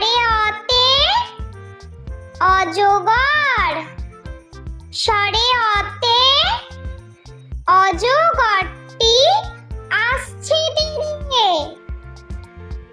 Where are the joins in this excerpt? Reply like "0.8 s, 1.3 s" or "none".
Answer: 12.0 s